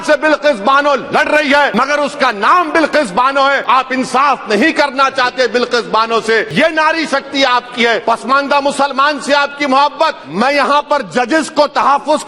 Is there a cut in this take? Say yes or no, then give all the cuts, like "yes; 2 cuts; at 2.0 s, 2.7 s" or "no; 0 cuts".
yes; 5 cuts; at 1.7 s, 3.6 s, 6.5 s, 8.0 s, 10.2 s